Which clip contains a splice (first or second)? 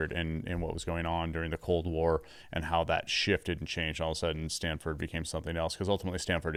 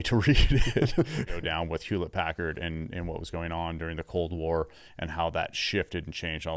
second